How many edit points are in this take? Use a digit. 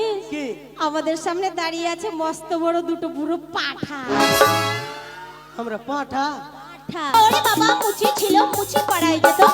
1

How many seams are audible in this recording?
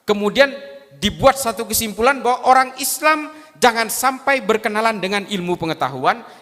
0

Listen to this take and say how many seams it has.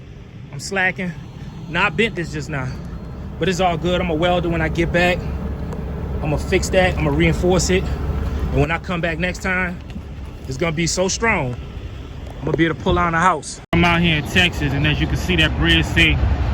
1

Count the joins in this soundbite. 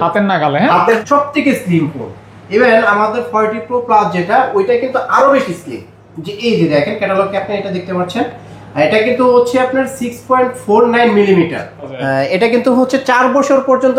2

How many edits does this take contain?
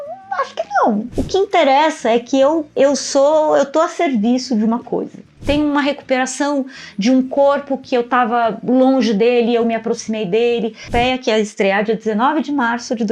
3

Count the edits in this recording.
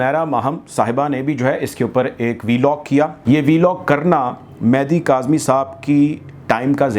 1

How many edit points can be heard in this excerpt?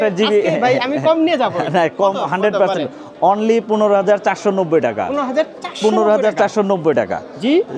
0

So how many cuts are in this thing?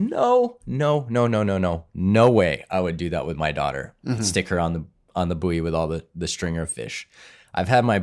0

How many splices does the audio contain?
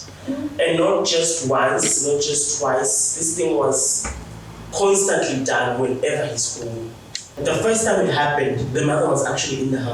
1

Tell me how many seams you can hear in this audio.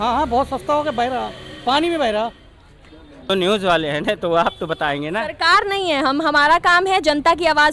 1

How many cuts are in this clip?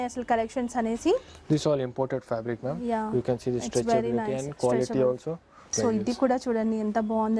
1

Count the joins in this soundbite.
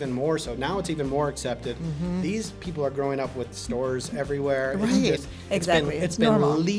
0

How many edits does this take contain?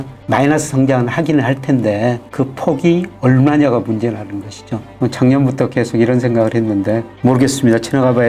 1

